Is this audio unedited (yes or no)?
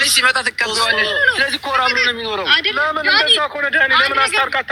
yes